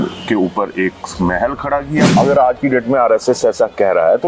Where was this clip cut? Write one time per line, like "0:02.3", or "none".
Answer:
0:02.1